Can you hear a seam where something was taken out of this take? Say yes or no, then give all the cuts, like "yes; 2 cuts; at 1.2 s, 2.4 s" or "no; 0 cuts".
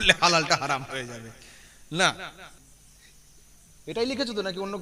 yes; 1 cut; at 2.6 s